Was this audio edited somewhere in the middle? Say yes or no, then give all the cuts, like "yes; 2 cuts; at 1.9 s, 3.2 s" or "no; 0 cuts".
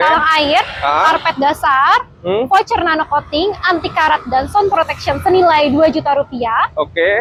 no; 0 cuts